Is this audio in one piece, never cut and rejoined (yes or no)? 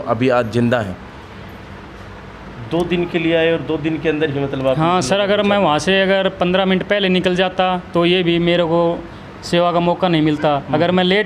yes